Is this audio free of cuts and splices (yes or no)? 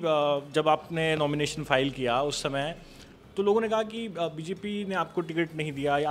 yes